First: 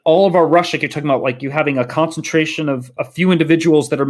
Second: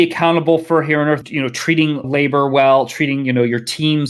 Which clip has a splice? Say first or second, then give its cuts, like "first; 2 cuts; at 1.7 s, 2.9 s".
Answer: second; 1 cut; at 1.3 s